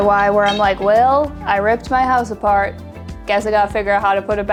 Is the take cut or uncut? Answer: uncut